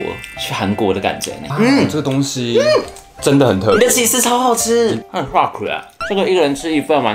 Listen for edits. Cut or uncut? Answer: cut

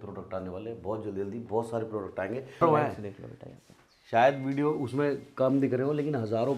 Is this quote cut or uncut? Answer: cut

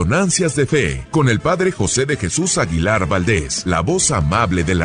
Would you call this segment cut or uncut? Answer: cut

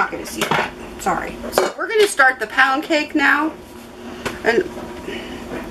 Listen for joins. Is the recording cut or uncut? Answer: uncut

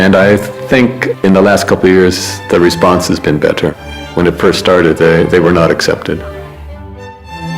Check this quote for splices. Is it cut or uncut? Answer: cut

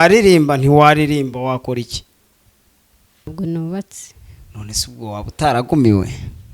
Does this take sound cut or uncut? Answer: cut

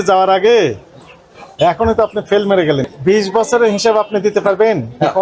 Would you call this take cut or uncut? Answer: cut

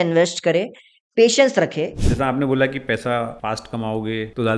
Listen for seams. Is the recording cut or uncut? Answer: cut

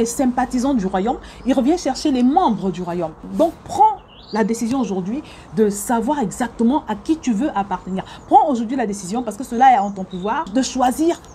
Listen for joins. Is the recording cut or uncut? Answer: cut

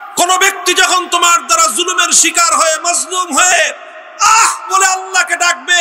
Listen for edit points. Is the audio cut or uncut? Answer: uncut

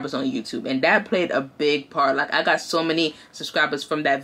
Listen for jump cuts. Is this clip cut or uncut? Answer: uncut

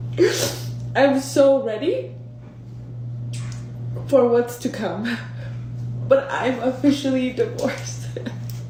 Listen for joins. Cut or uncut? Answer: uncut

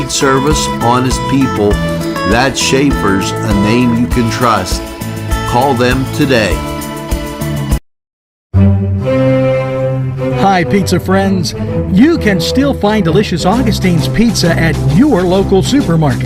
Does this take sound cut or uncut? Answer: uncut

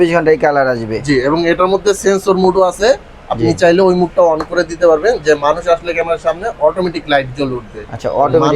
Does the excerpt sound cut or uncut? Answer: uncut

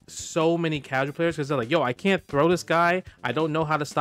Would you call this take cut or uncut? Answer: uncut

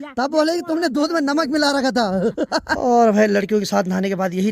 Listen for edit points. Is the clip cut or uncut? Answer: cut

